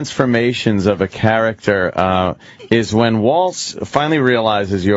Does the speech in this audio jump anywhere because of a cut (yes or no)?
no